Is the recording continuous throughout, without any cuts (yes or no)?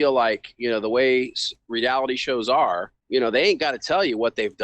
no